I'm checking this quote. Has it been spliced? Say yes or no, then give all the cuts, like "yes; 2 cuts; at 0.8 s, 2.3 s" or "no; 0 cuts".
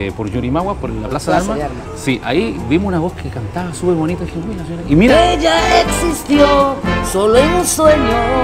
no; 0 cuts